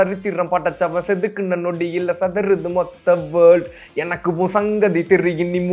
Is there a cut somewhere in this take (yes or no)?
no